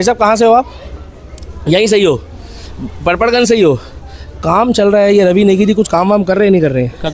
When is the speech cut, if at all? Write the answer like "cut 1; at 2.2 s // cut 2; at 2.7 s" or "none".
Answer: none